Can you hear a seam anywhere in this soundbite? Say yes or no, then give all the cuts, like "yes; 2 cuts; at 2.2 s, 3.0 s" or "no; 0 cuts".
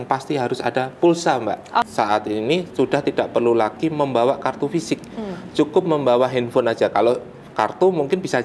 yes; 1 cut; at 1.9 s